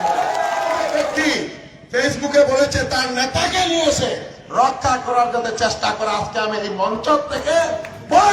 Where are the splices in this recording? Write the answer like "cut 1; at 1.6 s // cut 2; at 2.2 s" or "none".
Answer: cut 1; at 1.1 s